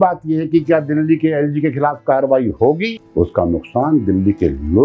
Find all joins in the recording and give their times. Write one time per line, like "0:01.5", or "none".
0:03.0